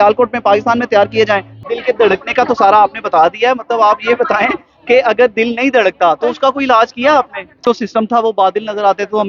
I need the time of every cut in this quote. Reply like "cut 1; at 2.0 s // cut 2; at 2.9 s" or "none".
cut 1; at 1.6 s // cut 2; at 7.6 s